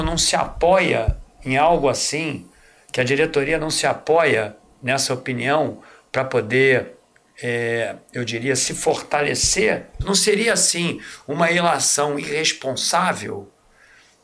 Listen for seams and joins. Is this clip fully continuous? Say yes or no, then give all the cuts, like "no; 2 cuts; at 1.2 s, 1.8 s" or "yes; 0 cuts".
no; 1 cut; at 10.0 s